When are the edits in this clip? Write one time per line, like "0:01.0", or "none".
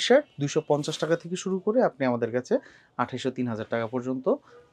none